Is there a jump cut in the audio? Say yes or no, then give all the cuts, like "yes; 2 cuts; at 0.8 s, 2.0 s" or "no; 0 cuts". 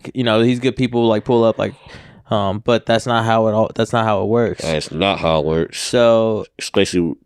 no; 0 cuts